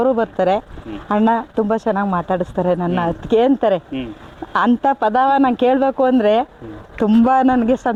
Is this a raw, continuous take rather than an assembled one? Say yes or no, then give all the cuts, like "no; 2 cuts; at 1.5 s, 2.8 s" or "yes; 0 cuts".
yes; 0 cuts